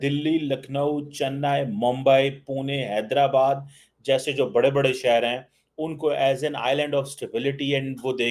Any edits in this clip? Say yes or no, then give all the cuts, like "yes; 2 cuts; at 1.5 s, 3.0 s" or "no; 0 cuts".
no; 0 cuts